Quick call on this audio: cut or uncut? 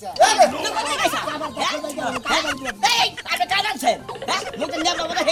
uncut